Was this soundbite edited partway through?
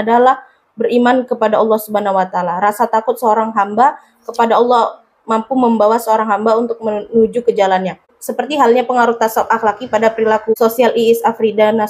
yes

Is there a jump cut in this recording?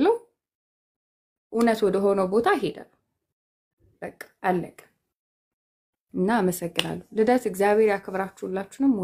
no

